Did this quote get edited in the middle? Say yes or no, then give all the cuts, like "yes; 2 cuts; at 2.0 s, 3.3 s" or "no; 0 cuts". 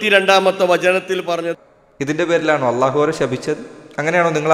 yes; 1 cut; at 1.5 s